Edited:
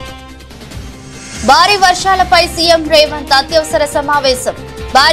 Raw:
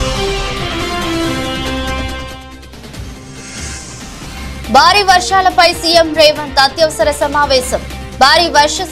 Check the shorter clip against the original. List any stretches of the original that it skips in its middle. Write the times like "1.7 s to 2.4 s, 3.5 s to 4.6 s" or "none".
3.6 s to 4.6 s